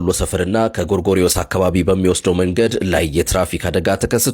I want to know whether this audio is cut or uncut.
uncut